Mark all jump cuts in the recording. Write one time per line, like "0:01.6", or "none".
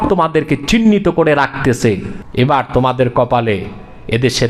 0:02.1